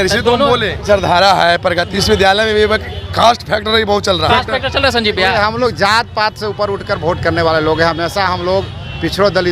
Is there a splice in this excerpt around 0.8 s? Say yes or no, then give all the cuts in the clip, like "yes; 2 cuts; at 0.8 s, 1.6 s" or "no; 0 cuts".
yes; 3 cuts; at 0.8 s, 2.0 s, 4.3 s